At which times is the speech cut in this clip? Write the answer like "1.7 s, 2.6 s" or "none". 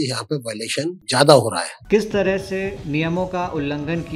1.0 s, 1.7 s